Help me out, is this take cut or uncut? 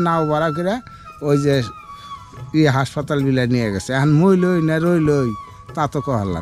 uncut